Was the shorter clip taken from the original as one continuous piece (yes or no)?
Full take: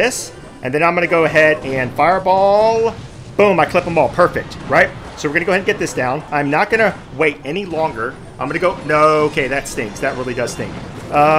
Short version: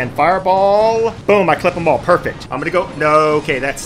no